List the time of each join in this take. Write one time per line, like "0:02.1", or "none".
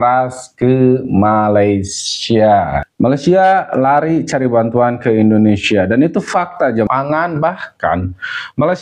0:02.8
0:06.9